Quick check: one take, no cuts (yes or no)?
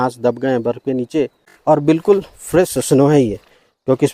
no